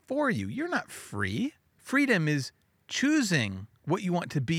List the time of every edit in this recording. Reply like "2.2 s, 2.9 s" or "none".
1.7 s

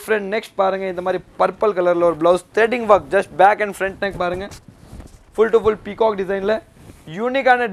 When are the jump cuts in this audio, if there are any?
none

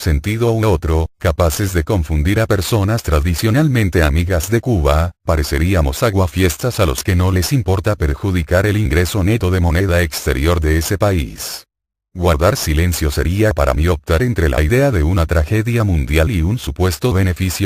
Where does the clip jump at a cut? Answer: 15.7 s

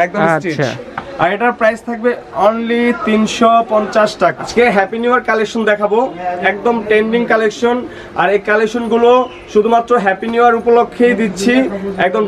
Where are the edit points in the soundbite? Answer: 4.4 s

